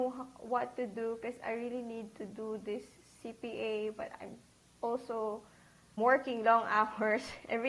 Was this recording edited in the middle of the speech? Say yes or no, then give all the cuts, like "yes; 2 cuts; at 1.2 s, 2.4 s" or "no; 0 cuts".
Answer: yes; 1 cut; at 6.0 s